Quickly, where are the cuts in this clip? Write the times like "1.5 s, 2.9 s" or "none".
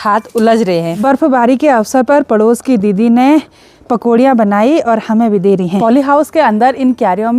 1.0 s, 5.8 s